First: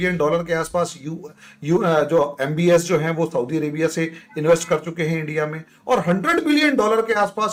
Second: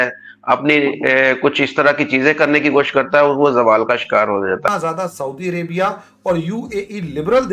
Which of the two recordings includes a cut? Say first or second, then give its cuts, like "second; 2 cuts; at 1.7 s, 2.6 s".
second; 1 cut; at 4.7 s